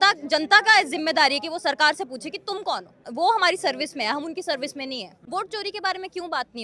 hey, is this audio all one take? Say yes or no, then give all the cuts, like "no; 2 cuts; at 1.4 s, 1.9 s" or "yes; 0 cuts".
no; 2 cuts; at 3.1 s, 5.2 s